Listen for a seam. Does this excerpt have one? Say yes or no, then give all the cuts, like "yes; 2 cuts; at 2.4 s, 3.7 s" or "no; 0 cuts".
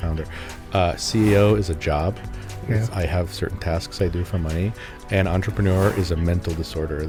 no; 0 cuts